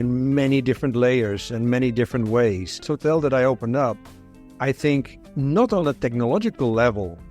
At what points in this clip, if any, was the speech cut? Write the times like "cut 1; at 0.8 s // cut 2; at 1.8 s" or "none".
cut 1; at 2.9 s